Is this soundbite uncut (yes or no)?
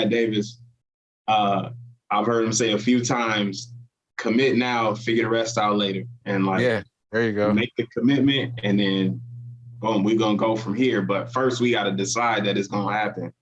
yes